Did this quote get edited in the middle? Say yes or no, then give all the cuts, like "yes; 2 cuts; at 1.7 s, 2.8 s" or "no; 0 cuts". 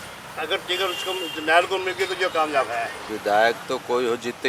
yes; 1 cut; at 3.1 s